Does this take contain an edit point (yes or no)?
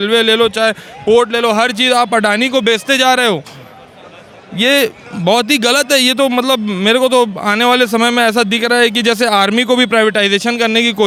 no